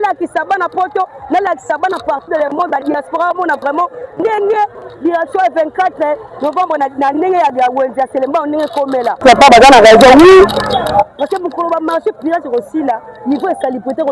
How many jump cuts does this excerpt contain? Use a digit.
1